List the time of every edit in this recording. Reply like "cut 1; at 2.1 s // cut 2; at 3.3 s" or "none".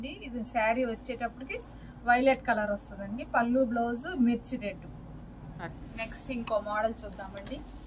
cut 1; at 5.8 s